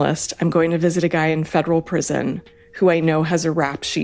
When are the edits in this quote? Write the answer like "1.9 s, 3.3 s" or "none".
none

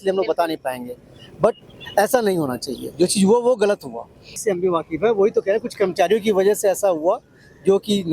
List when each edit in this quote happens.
4.4 s

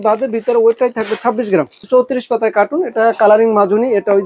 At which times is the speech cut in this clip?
1.8 s

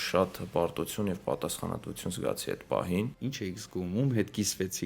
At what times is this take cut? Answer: 3.1 s

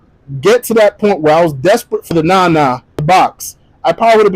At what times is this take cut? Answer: 2.1 s, 3.0 s

